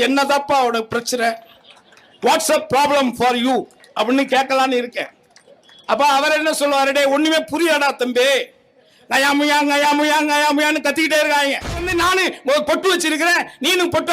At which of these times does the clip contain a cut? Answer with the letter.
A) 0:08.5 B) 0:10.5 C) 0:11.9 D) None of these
C